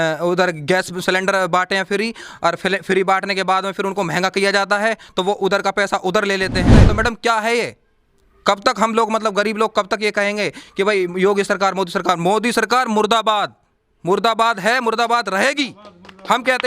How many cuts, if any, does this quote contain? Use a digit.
1